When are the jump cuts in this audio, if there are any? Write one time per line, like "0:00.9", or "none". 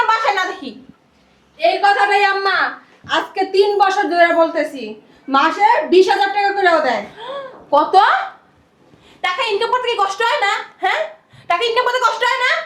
none